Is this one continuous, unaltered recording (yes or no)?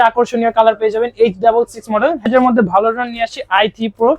no